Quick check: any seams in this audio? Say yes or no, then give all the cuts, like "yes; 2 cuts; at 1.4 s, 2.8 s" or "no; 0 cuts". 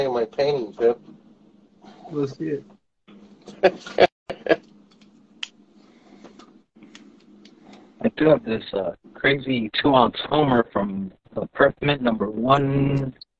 no; 0 cuts